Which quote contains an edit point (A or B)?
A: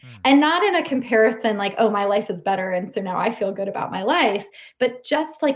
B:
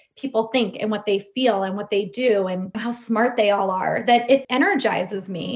B